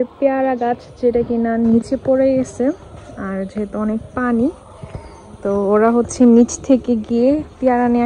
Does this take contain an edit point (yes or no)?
no